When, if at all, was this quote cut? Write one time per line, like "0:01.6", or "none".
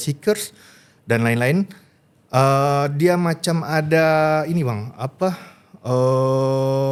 none